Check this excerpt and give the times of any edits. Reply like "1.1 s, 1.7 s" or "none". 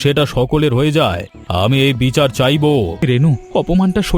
3.0 s